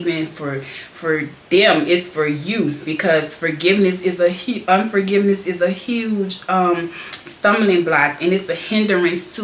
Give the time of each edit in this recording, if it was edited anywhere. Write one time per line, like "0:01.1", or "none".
none